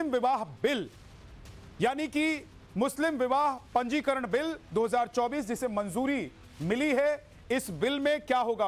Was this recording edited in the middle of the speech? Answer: yes; 1 cut; at 4.7 s

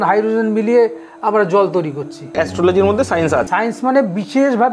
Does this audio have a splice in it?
yes; 2 cuts; at 2.3 s, 3.5 s

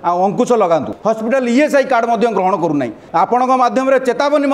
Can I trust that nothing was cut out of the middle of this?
no; 2 cuts; at 0.9 s, 3.0 s

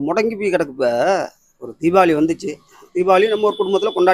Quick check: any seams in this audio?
no; 0 cuts

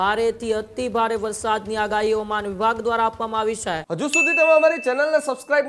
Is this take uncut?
no; 1 cut; at 3.8 s

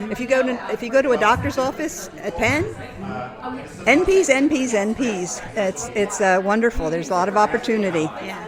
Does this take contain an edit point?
no; 0 cuts

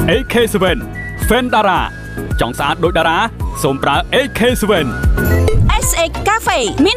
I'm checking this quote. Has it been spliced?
yes; 1 cut; at 5.3 s

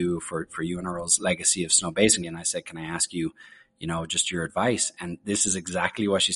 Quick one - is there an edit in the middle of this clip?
yes; 1 cut; at 2.2 s

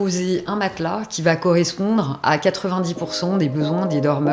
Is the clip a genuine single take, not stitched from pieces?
yes; 0 cuts

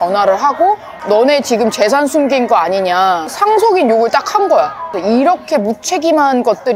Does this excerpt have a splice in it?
yes; 3 cuts; at 0.9 s, 3.3 s, 4.8 s

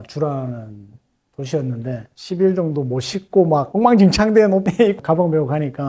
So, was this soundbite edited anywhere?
yes; 1 cut; at 2.1 s

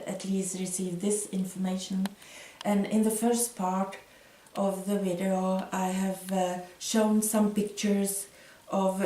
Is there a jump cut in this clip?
yes; 1 cut; at 3.4 s

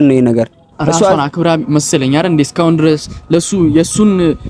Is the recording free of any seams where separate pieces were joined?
no; 1 cut; at 1.0 s

